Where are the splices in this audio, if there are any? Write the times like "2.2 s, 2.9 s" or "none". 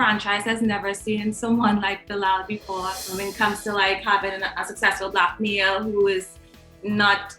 3.1 s

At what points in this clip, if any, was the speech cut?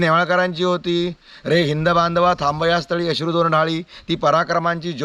none

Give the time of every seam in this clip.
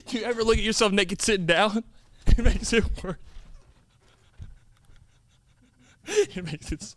none

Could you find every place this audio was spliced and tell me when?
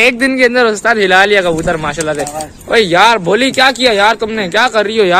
none

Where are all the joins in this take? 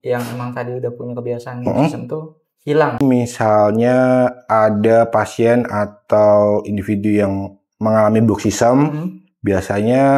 3.0 s

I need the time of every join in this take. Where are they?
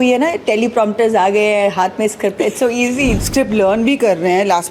3.2 s

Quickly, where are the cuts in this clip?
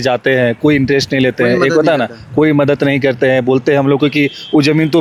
none

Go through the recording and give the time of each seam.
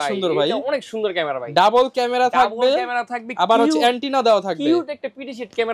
none

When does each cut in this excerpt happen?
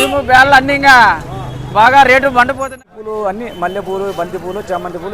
2.6 s

